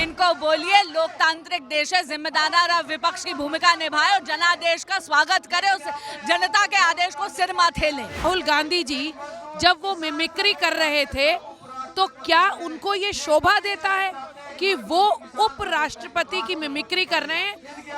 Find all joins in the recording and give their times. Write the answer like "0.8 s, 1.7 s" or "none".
8.2 s